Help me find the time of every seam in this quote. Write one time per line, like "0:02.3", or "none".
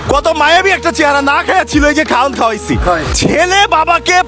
0:03.1

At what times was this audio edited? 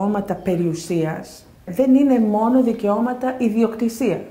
0:01.7

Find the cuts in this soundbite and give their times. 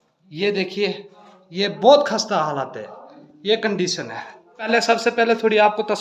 0:04.7

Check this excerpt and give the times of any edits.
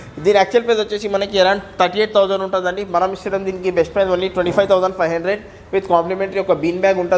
none

